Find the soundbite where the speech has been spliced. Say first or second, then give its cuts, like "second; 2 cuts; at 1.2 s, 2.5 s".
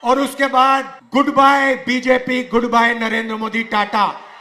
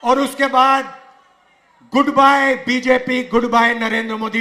first; 1 cut; at 1.0 s